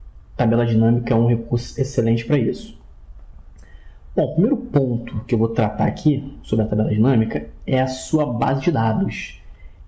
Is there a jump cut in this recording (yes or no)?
yes